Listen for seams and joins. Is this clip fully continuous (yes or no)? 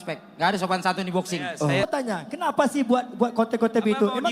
no